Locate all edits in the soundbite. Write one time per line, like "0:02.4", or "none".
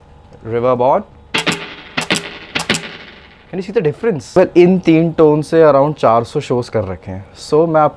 0:04.4

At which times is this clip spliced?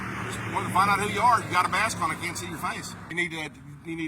0:03.1

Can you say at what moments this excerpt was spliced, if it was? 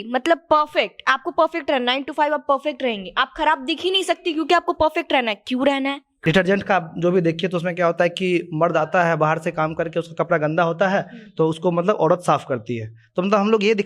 0:06.1

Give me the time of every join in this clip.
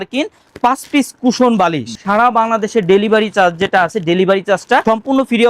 0:02.0

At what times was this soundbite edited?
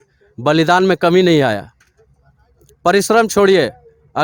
none

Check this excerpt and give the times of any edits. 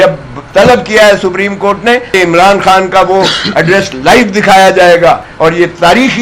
0:02.1
0:05.3

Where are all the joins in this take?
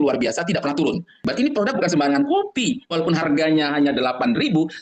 0:01.2

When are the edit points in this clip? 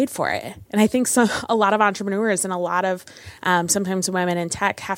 none

